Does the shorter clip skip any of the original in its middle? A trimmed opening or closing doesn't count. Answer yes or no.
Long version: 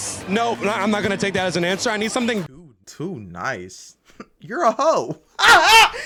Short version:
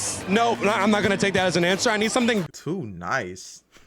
yes